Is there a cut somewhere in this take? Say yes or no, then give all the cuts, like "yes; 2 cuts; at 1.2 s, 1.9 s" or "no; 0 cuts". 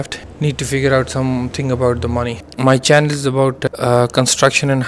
yes; 2 cuts; at 2.3 s, 3.6 s